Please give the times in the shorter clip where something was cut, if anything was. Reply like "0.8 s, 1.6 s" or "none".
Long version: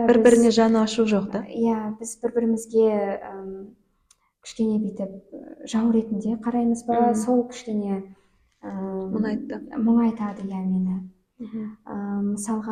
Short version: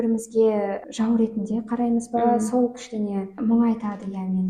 0.8 s, 3.3 s